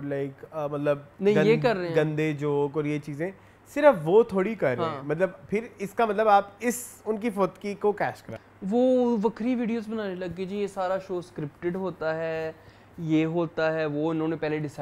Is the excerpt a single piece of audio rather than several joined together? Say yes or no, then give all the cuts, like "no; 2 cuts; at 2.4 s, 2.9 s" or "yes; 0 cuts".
no; 2 cuts; at 1.1 s, 8.2 s